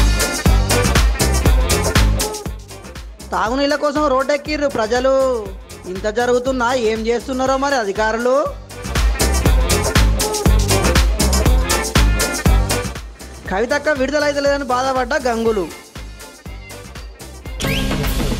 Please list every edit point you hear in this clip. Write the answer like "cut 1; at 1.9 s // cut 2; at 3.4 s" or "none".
cut 1; at 17.5 s